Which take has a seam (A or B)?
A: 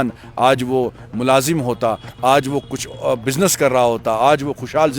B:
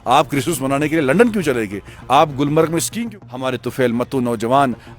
B